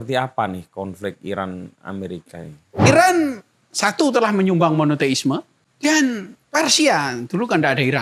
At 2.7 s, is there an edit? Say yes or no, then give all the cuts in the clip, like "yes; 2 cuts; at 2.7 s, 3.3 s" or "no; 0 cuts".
yes; 2 cuts; at 2.7 s, 5.6 s